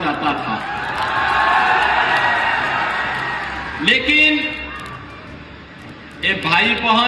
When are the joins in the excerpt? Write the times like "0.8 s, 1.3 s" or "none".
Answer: none